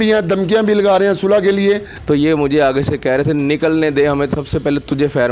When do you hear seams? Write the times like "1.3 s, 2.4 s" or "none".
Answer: 1.9 s